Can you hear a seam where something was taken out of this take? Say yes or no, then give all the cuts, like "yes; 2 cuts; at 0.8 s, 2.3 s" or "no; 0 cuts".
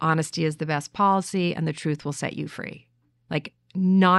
no; 0 cuts